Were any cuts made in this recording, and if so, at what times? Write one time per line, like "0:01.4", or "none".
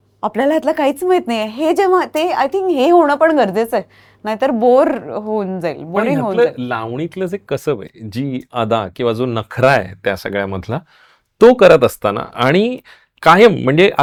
none